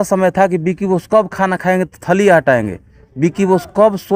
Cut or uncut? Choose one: uncut